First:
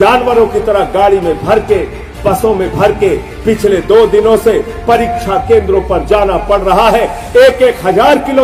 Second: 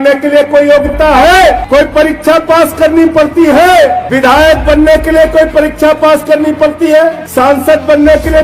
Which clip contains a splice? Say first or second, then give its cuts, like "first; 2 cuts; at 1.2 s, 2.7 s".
second; 3 cuts; at 1.6 s, 4.0 s, 7.2 s